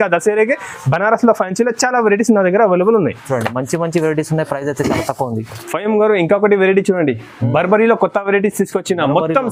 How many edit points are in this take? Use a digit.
0